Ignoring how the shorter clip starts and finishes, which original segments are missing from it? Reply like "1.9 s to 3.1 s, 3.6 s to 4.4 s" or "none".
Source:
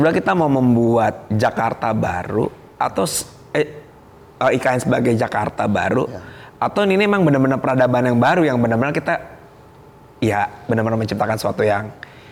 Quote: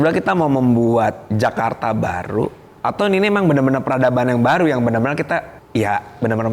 2.6 s to 6.4 s, 9.3 s to 10.0 s